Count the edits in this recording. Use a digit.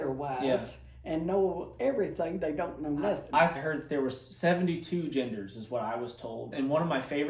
2